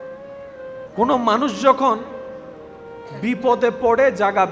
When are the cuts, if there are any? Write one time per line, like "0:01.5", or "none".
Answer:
0:00.9